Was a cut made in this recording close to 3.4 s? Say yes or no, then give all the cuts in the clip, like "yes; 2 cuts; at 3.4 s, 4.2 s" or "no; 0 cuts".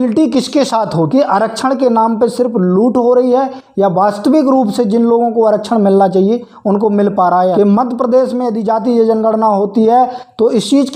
no; 2 cuts; at 1.1 s, 7.5 s